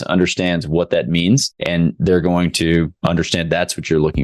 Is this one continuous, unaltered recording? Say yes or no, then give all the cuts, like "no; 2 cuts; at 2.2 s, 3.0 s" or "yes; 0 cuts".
no; 2 cuts; at 1.5 s, 2.9 s